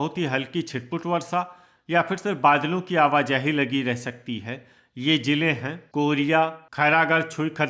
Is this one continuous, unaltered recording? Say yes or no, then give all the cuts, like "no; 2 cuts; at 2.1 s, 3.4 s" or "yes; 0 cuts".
no; 1 cut; at 5.8 s